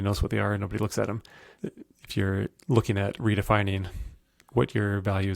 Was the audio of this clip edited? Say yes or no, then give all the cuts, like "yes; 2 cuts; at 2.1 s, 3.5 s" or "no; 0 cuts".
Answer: no; 0 cuts